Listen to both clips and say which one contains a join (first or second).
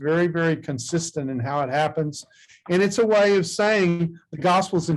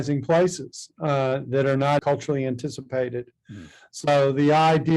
second